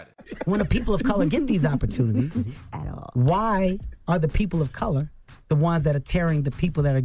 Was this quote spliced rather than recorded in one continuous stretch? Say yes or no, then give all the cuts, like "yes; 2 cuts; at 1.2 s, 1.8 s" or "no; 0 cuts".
no; 0 cuts